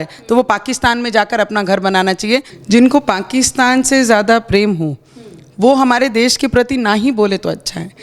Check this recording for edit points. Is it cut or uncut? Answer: cut